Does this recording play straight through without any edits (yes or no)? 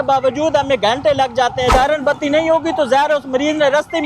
no